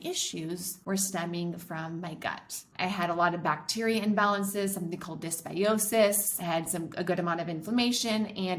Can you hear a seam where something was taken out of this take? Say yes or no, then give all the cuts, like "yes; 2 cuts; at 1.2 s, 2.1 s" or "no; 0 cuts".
yes; 1 cut; at 6.3 s